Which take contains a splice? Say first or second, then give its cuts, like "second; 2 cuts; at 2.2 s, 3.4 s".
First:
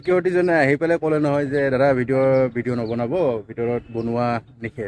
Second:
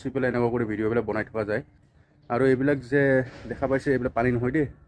second; 1 cut; at 1.8 s